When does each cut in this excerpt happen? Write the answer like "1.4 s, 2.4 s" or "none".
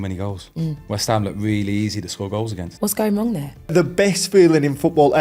0.8 s, 2.6 s, 3.7 s